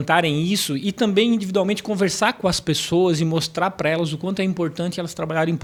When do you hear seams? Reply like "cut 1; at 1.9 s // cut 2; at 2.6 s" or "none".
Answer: none